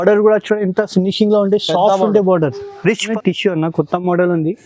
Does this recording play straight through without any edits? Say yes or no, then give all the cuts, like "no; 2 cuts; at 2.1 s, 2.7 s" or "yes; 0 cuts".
no; 1 cut; at 3.1 s